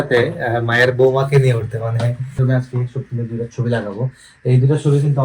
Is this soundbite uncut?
no; 1 cut; at 2.4 s

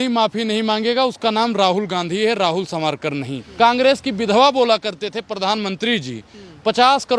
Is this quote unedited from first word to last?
no; 1 cut; at 3.4 s

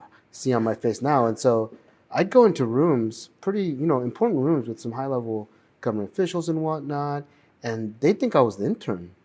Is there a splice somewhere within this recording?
no; 0 cuts

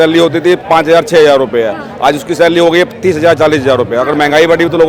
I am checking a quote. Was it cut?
no; 0 cuts

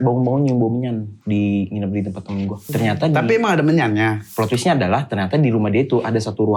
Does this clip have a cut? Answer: yes; 3 cuts; at 1.1 s, 2.7 s, 4.2 s

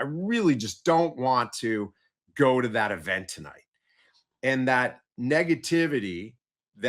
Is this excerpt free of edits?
yes; 0 cuts

